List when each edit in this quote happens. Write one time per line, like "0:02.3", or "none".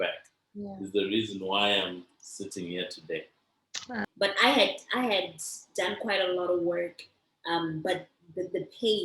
0:04.1